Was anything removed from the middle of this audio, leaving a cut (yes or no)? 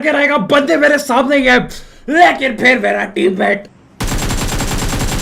yes